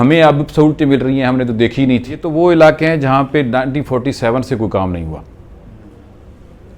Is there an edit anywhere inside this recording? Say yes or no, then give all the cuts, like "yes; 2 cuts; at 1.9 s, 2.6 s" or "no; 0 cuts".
yes; 1 cut; at 2.2 s